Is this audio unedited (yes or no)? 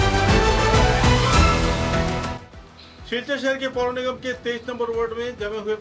yes